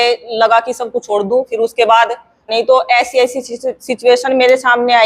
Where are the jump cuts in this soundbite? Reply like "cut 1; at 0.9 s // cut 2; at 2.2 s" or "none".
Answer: cut 1; at 2.5 s